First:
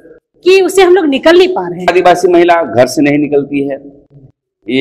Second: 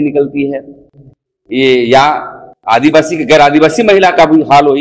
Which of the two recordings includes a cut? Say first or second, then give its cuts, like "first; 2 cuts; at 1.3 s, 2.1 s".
first; 1 cut; at 1.9 s